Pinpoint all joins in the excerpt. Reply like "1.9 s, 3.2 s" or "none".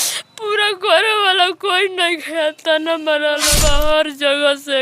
3.5 s